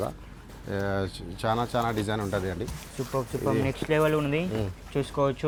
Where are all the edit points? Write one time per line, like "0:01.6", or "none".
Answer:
none